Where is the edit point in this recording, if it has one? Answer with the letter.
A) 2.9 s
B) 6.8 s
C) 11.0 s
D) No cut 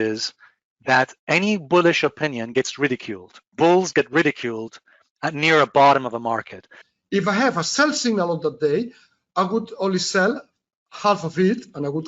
B